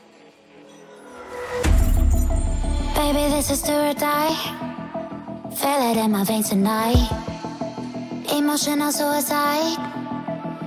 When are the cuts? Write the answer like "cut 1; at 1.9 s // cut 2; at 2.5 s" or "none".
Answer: cut 1; at 4.3 s